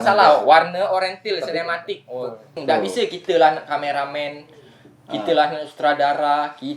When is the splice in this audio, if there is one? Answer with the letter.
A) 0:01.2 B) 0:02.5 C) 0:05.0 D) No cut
B